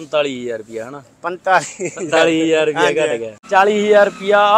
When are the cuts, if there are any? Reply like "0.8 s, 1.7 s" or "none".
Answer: 3.3 s